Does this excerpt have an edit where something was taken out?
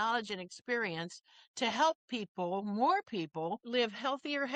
yes; 1 cut; at 3.6 s

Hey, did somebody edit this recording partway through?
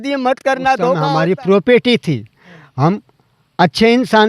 yes; 1 cut; at 1.0 s

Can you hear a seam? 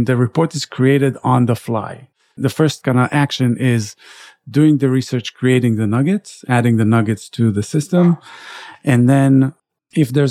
yes; 1 cut; at 2.4 s

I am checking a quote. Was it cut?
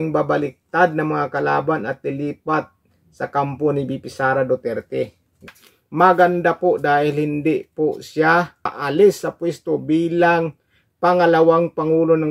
yes; 2 cuts; at 5.5 s, 8.8 s

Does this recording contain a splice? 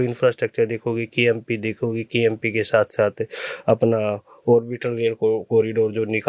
no; 0 cuts

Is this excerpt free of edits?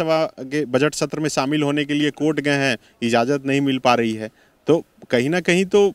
yes; 0 cuts

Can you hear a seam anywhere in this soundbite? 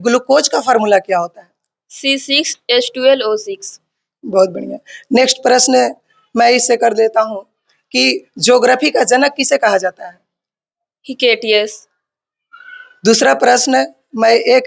no; 0 cuts

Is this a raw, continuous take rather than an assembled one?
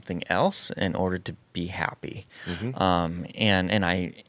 yes; 0 cuts

